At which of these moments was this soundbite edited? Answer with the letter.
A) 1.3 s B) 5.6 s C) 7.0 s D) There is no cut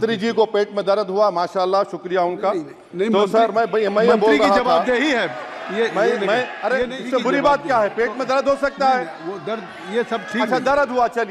C